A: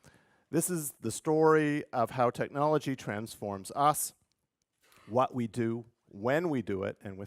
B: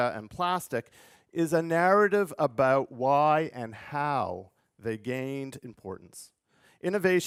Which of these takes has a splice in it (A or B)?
A